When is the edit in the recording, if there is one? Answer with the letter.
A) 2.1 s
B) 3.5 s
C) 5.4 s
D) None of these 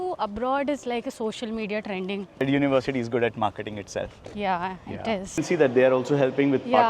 C